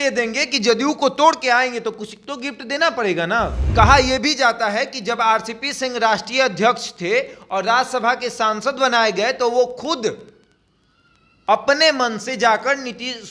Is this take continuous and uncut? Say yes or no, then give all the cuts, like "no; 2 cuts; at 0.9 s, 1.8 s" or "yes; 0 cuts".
no; 1 cut; at 3.7 s